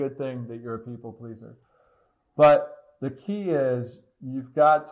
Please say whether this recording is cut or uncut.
uncut